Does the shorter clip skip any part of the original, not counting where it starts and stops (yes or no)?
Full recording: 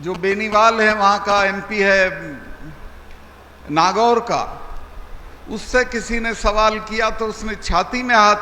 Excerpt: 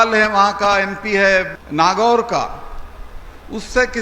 yes